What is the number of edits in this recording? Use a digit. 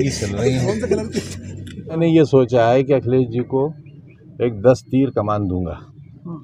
1